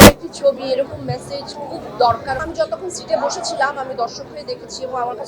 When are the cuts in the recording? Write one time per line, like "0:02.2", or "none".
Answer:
0:02.4